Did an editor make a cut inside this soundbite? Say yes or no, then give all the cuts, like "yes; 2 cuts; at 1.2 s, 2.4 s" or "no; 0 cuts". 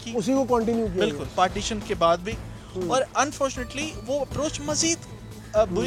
no; 0 cuts